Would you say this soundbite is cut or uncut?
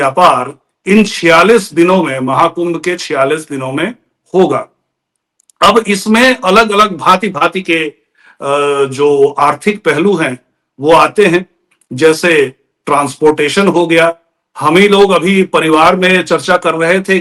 uncut